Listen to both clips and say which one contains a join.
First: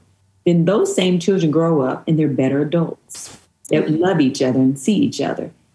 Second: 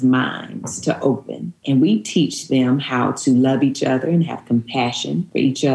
second; 1 cut; at 1.6 s

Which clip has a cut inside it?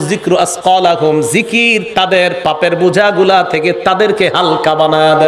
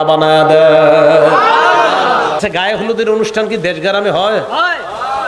second; 1 cut; at 2.4 s

